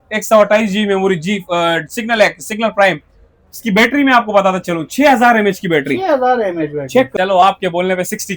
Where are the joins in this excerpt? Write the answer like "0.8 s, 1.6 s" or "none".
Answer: 7.1 s

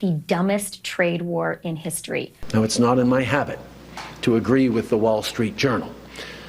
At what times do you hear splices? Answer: 2.4 s

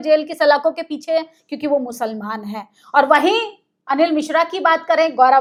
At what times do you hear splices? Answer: none

